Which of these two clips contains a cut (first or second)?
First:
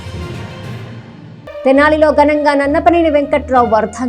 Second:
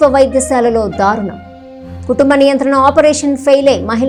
first